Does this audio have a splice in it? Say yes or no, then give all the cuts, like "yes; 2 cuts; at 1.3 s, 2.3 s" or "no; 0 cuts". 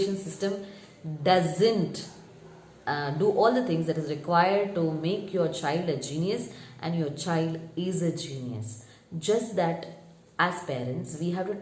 no; 0 cuts